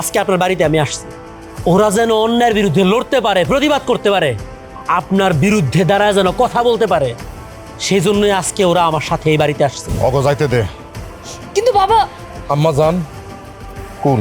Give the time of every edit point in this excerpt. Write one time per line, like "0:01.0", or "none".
0:09.8